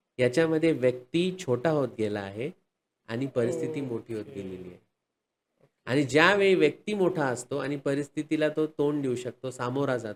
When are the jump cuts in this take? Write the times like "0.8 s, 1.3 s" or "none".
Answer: none